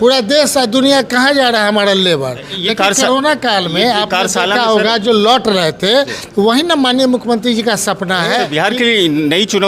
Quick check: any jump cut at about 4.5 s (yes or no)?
no